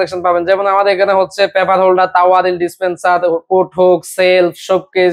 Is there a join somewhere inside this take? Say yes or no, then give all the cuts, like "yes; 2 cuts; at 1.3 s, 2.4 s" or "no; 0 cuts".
no; 0 cuts